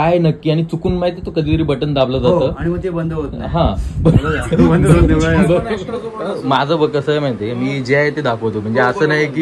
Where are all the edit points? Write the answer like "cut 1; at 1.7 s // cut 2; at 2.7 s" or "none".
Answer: cut 1; at 5.8 s